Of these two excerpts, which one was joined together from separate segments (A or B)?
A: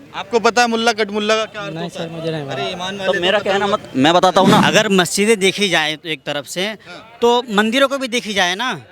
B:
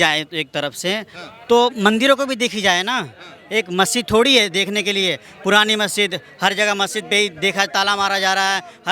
A